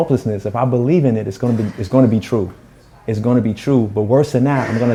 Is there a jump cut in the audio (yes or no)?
no